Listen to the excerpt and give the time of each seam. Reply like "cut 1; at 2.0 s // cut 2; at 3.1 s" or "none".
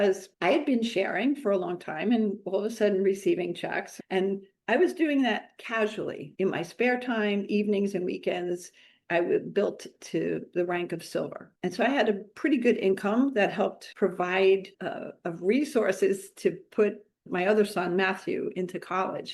cut 1; at 3.9 s // cut 2; at 14.7 s // cut 3; at 17.2 s